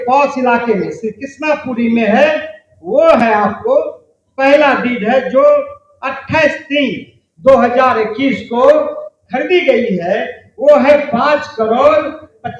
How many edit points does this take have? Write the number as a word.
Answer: zero